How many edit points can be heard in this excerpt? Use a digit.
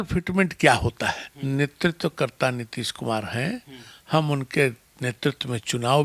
1